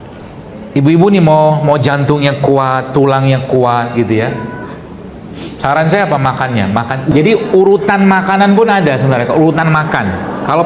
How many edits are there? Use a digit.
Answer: 1